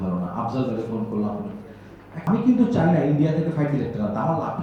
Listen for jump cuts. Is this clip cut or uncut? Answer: cut